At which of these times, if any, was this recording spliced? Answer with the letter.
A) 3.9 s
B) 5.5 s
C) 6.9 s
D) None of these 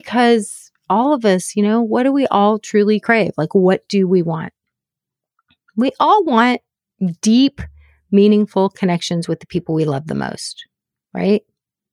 D